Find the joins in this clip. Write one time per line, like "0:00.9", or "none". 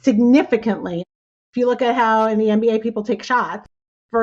0:01.1